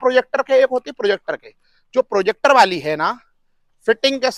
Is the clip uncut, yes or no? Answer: yes